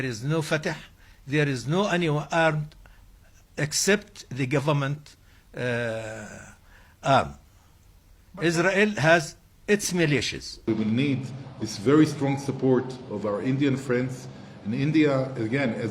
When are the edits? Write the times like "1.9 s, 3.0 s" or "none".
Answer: 10.6 s